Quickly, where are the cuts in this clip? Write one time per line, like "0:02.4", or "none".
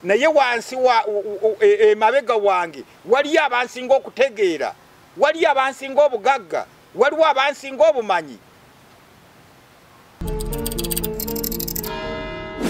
none